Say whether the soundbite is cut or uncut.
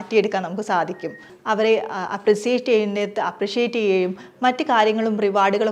cut